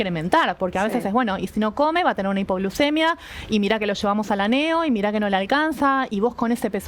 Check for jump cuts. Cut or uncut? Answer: uncut